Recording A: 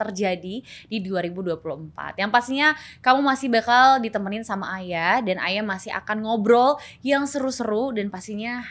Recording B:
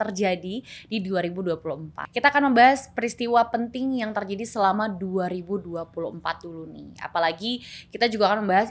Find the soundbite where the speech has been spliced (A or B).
B